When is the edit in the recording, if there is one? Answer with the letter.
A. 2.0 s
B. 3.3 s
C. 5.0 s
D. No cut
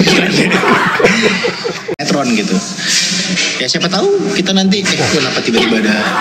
A